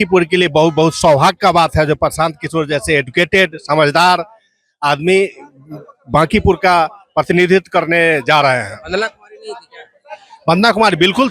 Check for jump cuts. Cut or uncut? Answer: uncut